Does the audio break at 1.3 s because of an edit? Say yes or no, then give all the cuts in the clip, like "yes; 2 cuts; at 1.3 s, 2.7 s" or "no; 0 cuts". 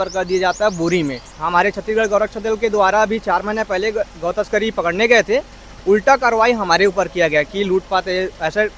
yes; 1 cut; at 1.3 s